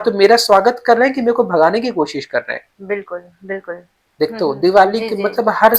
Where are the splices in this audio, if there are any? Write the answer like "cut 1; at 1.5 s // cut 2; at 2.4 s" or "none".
cut 1; at 4.0 s